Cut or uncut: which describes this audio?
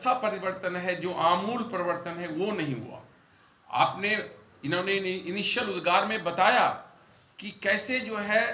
uncut